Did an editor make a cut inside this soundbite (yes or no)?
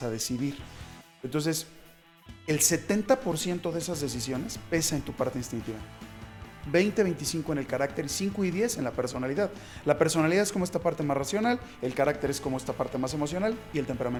no